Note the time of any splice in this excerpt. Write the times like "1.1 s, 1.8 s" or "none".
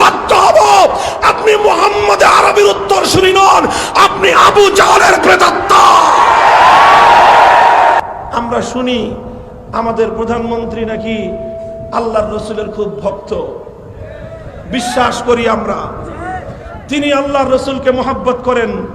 8.0 s